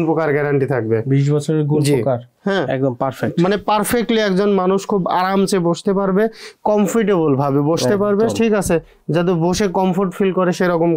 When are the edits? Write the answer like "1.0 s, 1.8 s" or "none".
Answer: 2.3 s